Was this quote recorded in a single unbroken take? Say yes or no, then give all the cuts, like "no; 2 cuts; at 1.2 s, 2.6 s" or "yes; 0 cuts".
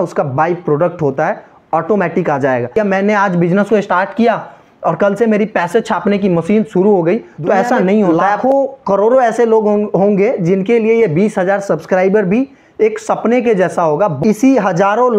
no; 3 cuts; at 2.7 s, 8.2 s, 14.2 s